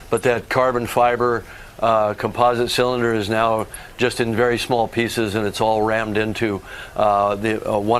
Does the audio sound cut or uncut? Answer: uncut